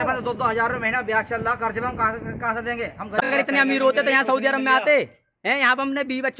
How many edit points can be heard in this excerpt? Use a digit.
1